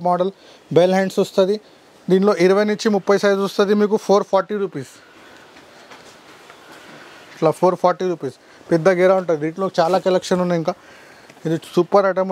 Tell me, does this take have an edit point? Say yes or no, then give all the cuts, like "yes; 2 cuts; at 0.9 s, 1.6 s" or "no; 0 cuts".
no; 0 cuts